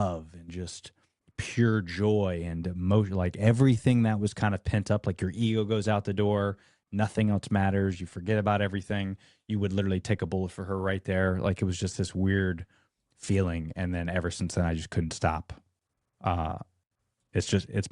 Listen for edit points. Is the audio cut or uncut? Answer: uncut